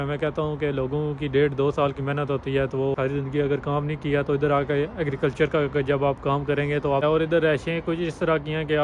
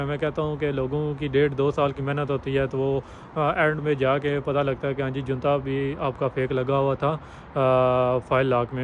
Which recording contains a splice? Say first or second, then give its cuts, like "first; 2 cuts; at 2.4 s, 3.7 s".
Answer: first; 2 cuts; at 2.9 s, 7.0 s